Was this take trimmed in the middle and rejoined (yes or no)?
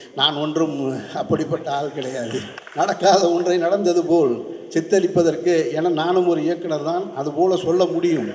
yes